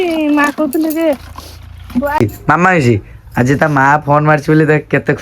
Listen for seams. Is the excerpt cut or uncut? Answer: cut